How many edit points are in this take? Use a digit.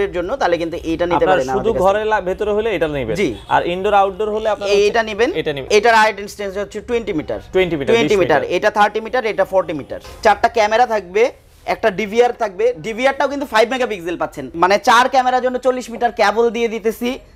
3